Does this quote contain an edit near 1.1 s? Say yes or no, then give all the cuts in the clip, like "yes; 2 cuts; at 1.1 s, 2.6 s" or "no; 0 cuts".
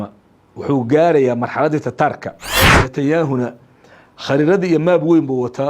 no; 1 cut; at 2.8 s